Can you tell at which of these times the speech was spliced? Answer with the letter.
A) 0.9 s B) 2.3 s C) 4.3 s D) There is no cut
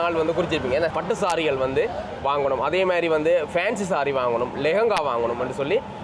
A